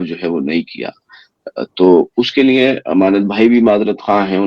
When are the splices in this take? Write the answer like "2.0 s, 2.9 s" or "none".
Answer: none